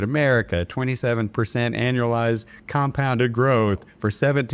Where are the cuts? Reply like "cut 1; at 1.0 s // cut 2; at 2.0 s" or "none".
none

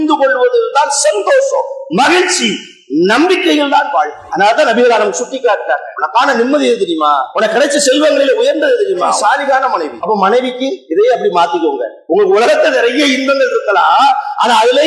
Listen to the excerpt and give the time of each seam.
cut 1; at 4.2 s // cut 2; at 5.9 s // cut 3; at 7.3 s // cut 4; at 9.2 s // cut 5; at 9.9 s // cut 6; at 10.8 s // cut 7; at 11.9 s

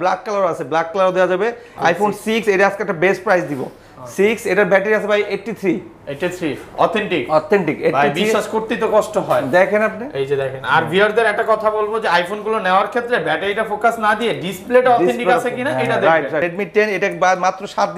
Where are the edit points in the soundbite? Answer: cut 1; at 1.6 s // cut 2; at 16.4 s

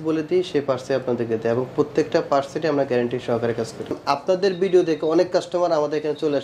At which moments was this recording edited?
cut 1; at 4.0 s

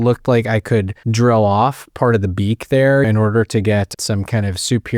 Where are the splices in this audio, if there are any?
cut 1; at 1.0 s // cut 2; at 3.0 s // cut 3; at 4.0 s

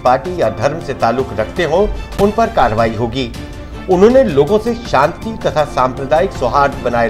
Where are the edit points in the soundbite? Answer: none

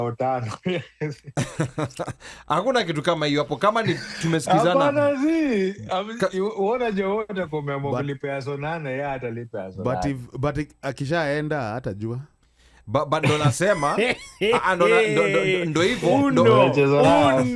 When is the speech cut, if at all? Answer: none

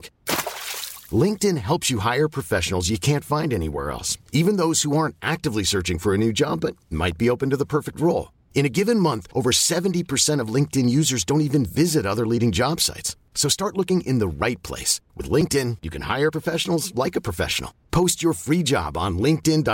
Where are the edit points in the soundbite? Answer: none

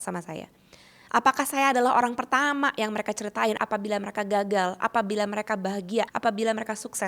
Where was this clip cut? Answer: cut 1; at 3.6 s // cut 2; at 6.1 s

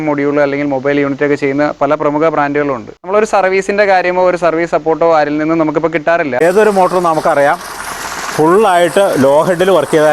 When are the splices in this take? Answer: cut 1; at 2.9 s // cut 2; at 6.4 s

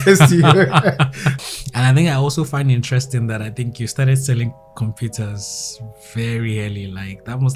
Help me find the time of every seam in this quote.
cut 1; at 1.2 s

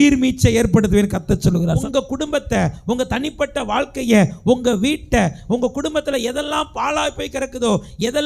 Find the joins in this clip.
cut 1; at 1.9 s

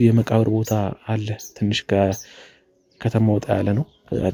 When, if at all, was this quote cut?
none

